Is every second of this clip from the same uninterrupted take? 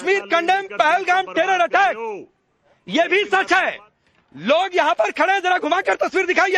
yes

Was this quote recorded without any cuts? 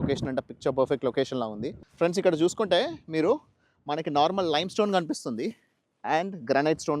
no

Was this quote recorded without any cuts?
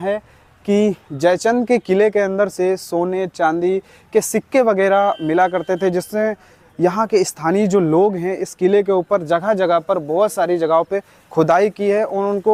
yes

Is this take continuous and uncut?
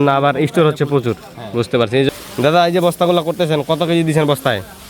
no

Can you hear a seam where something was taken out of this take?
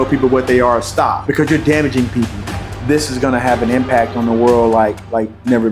yes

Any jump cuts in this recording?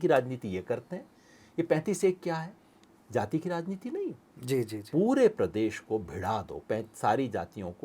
no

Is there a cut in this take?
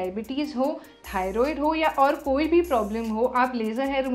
no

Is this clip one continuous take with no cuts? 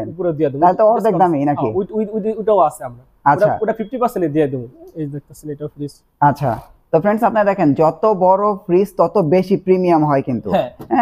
no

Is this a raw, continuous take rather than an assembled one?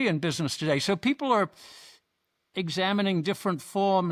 yes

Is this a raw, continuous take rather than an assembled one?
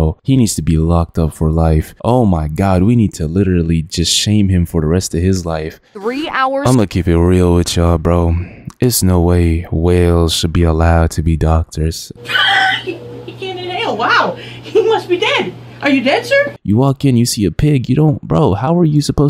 no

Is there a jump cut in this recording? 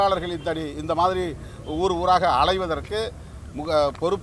no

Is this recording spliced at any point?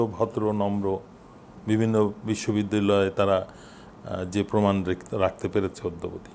no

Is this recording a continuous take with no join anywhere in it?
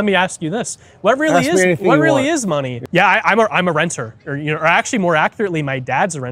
no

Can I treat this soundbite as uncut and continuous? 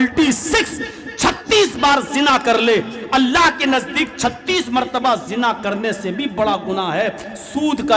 yes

